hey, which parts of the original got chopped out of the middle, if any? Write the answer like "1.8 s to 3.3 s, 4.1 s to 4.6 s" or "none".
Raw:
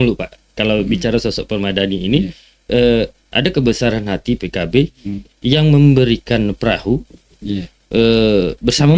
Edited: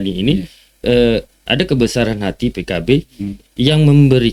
none